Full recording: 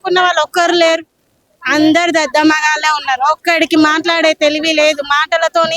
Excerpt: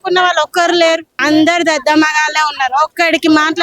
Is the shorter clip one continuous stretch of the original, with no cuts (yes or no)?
no